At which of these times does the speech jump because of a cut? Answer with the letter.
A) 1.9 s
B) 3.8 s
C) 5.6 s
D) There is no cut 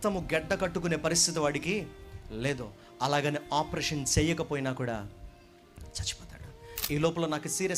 D